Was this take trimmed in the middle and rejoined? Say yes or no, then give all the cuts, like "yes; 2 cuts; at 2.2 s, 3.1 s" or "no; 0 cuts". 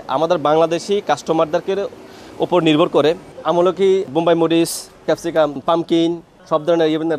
yes; 3 cuts; at 4.1 s, 5.2 s, 6.3 s